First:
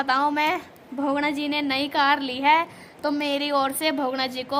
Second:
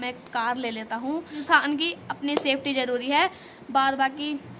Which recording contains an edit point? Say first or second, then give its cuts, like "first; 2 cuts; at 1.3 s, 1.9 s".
second; 1 cut; at 1.3 s